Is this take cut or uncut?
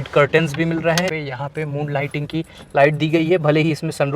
cut